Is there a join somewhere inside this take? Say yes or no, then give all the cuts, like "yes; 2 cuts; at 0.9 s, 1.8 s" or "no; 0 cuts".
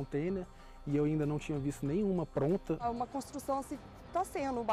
yes; 1 cut; at 2.8 s